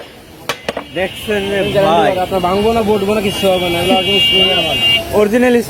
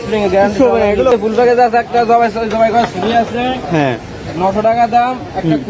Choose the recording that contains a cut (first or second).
second